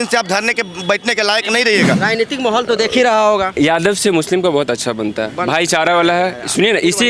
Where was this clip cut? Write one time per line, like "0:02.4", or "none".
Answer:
0:02.0